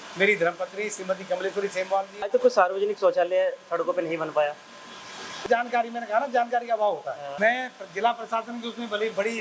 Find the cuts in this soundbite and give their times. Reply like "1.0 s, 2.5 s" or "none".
2.3 s, 5.4 s, 7.2 s